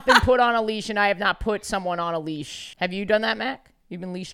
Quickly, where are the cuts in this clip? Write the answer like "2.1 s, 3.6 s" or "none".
2.6 s